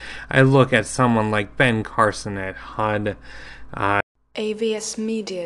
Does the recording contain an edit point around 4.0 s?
yes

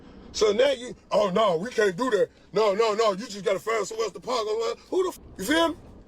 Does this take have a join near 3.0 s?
no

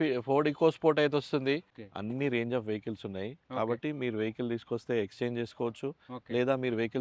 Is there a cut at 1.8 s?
yes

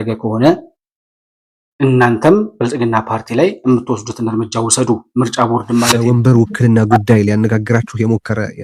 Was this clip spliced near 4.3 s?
no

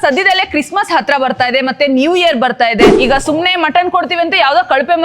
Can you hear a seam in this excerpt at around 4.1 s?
no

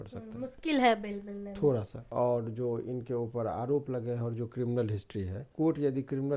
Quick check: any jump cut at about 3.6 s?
no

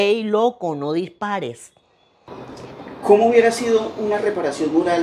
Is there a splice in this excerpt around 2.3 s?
yes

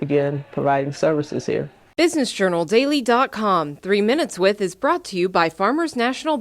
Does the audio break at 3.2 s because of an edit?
no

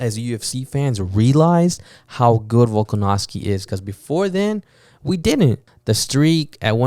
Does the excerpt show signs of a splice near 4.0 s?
no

